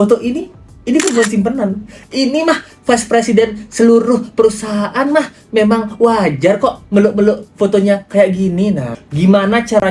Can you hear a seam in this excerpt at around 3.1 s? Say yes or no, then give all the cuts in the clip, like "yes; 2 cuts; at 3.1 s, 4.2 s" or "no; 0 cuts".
no; 1 cut; at 8.9 s